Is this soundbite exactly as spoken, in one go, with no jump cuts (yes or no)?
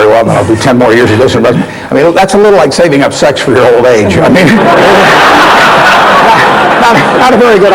yes